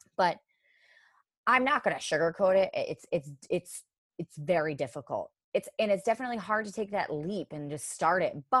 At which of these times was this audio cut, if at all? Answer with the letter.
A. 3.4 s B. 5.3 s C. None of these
B